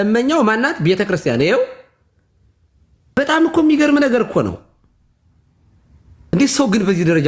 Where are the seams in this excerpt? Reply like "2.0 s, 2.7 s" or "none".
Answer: 3.2 s, 6.3 s

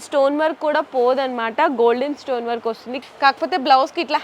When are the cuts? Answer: 3.0 s

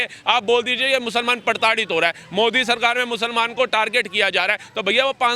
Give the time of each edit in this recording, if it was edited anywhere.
none

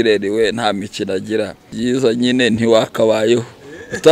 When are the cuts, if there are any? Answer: 1.7 s

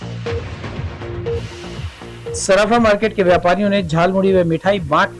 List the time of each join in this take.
2.4 s

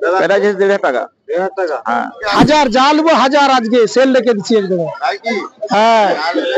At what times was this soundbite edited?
2.2 s

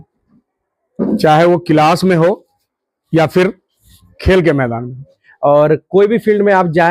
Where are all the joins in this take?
5.2 s

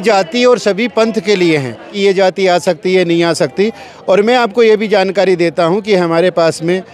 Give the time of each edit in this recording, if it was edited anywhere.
1.9 s

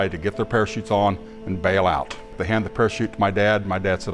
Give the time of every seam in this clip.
2.4 s

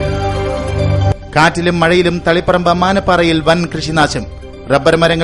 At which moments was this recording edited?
1.1 s

